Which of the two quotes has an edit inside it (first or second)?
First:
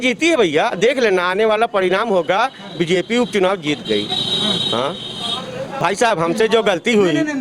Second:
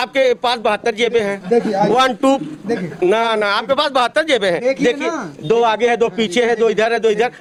first